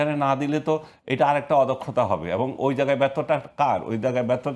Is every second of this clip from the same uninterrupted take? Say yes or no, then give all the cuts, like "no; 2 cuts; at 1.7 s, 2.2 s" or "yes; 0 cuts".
yes; 0 cuts